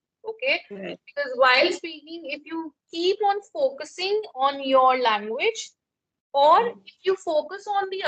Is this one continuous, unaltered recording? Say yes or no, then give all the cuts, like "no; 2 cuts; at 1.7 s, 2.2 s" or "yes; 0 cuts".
yes; 0 cuts